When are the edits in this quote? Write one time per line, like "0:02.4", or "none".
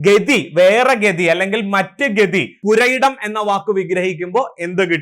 0:02.5